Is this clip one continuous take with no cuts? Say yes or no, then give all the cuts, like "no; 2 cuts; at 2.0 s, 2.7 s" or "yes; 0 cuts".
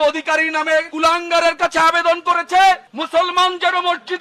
no; 1 cut; at 0.9 s